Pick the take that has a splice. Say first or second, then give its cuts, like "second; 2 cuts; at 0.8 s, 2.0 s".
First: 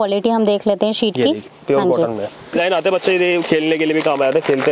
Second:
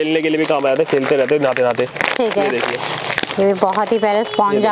first; 2 cuts; at 1.5 s, 2.6 s